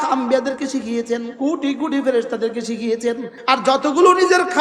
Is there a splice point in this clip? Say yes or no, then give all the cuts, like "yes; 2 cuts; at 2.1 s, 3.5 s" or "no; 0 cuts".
yes; 2 cuts; at 1.3 s, 3.3 s